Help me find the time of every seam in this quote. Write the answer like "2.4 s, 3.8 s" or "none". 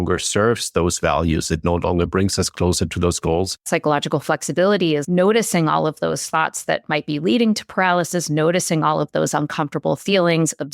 3.6 s, 5.0 s